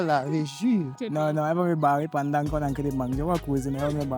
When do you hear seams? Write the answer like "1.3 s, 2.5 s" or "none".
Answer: 1.0 s